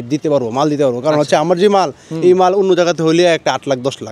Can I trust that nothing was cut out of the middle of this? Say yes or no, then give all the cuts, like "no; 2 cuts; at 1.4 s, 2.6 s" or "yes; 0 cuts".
yes; 0 cuts